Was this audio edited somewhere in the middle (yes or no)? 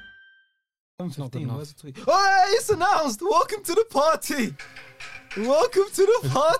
yes